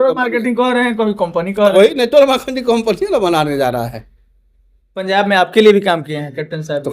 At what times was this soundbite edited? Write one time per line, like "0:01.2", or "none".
0:05.1

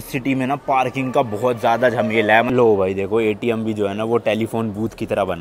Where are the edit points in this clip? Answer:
0:02.5

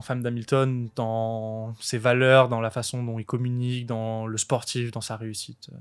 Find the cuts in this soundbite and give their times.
none

